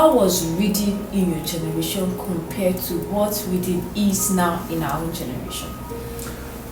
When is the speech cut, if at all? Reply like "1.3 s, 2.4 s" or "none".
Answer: none